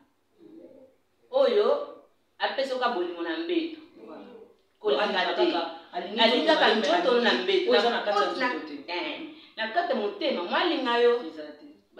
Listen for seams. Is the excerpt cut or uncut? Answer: uncut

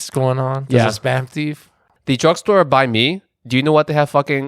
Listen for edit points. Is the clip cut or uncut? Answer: cut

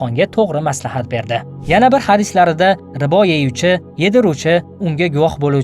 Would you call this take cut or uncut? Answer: cut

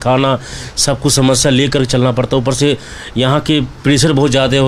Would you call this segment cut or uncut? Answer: uncut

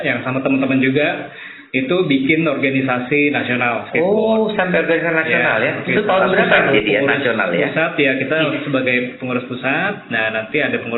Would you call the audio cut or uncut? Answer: cut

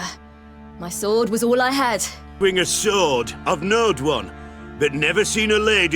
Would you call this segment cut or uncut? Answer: cut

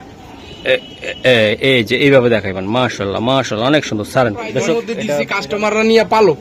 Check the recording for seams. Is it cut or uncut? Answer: cut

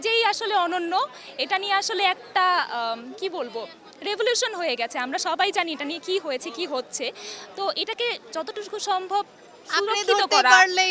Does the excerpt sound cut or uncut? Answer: uncut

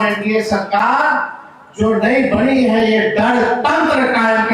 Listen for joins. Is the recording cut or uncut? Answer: uncut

